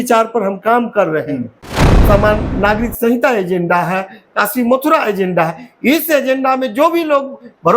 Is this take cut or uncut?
cut